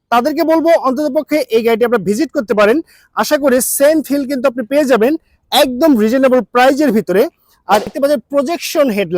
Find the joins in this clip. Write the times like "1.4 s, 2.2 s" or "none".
7.9 s